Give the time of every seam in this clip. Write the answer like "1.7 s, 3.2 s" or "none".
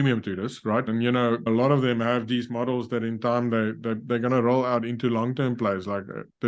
1.0 s